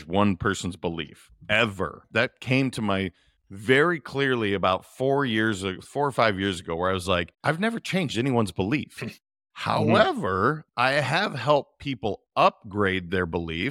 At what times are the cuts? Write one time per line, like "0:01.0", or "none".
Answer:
0:02.0
0:07.3